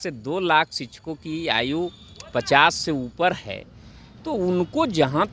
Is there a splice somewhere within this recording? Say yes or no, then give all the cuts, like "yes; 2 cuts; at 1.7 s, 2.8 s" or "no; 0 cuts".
no; 0 cuts